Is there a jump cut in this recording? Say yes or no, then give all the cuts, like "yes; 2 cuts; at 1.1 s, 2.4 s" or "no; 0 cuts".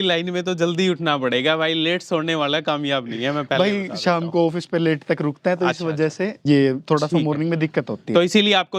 yes; 1 cut; at 6.4 s